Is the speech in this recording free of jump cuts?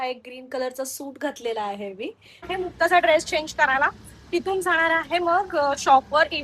no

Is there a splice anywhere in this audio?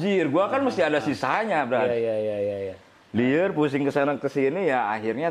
no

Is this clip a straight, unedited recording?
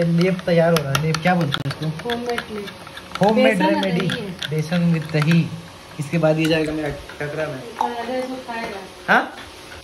yes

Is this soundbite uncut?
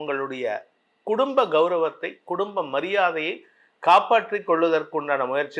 yes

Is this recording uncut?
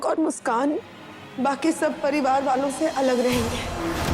yes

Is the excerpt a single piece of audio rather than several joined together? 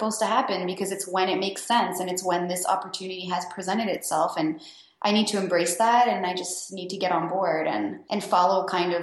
no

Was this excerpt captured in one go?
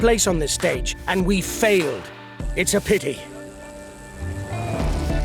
no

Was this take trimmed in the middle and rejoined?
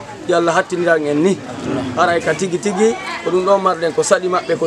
no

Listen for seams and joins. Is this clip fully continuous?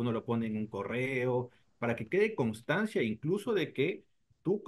yes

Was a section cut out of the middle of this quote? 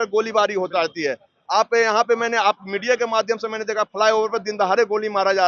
no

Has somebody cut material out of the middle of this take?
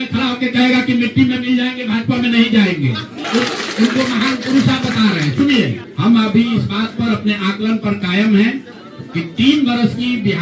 yes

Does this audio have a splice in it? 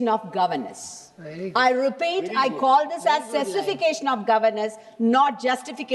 no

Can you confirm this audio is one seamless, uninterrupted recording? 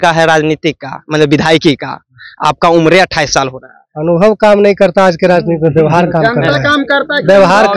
yes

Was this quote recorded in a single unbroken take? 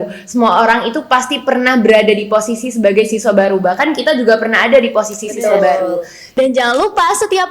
no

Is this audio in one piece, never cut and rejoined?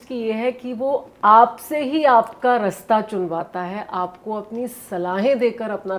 yes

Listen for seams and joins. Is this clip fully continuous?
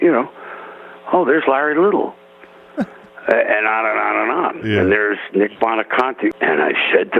no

